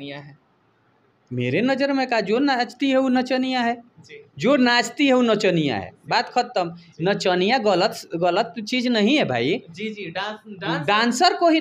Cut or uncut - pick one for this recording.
uncut